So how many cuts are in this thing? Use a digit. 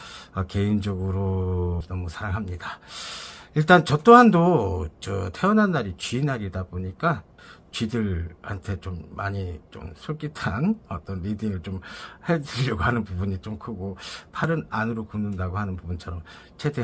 1